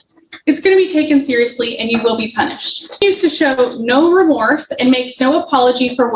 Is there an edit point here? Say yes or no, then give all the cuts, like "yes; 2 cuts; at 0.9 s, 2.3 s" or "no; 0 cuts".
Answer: yes; 1 cut; at 3.0 s